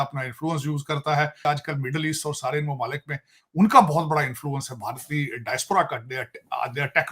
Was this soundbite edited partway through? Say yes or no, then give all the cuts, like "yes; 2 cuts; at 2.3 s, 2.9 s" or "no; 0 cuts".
yes; 1 cut; at 1.4 s